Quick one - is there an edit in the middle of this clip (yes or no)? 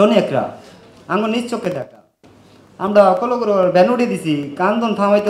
no